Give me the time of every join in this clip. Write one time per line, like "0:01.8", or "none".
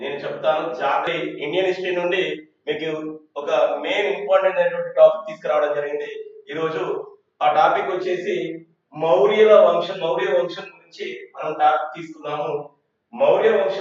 0:01.1